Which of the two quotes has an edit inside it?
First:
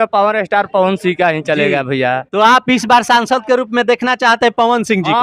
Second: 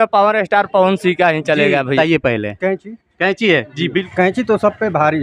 second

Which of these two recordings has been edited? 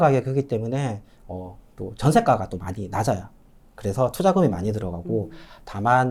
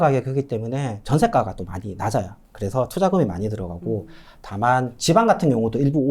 second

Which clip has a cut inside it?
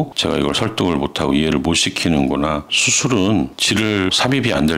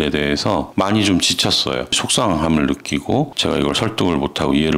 first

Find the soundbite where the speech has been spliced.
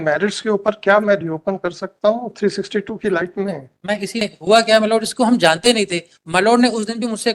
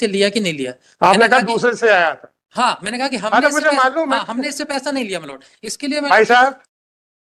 first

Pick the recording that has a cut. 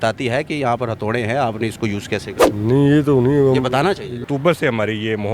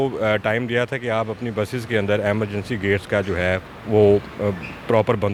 first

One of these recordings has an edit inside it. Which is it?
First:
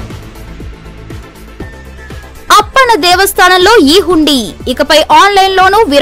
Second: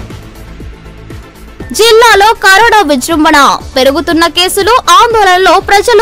first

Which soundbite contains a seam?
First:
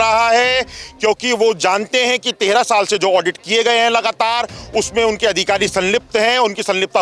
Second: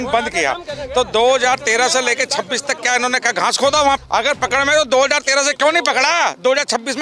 second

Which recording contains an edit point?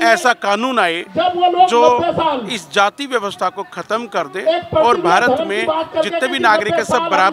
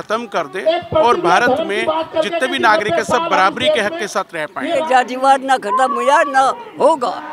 second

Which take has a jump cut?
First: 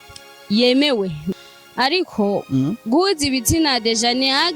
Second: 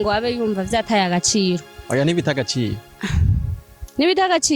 first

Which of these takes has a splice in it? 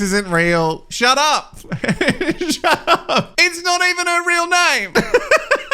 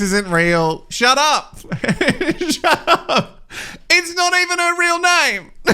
first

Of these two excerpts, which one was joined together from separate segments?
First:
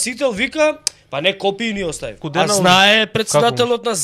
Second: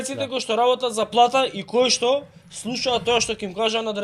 first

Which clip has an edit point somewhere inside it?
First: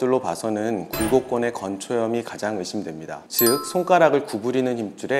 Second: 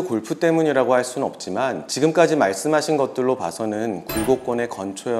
second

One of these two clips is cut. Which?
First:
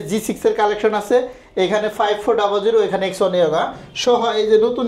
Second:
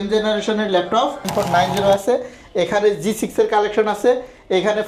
second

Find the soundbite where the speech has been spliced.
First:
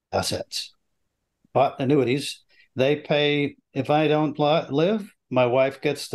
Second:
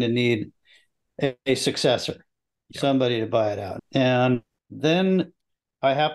second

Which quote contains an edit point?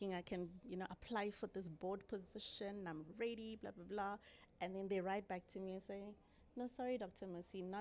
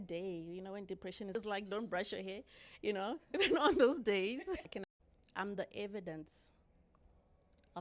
second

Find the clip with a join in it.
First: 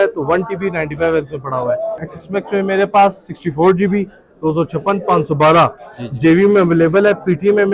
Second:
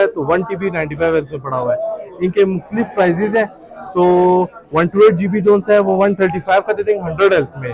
first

